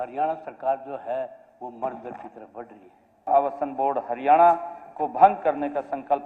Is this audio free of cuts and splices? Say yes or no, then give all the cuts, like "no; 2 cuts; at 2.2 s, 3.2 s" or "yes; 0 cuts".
no; 1 cut; at 3.3 s